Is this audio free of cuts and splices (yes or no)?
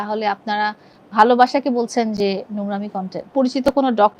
no